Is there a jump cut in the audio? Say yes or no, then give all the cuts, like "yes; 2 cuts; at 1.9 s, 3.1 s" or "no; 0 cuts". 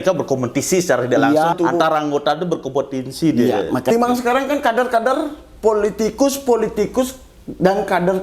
yes; 2 cuts; at 1.5 s, 3.9 s